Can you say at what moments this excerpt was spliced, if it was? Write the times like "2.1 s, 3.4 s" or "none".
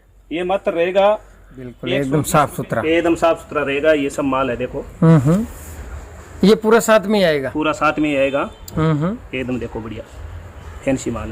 1.8 s